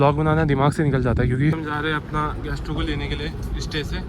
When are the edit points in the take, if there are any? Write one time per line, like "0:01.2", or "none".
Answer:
0:01.6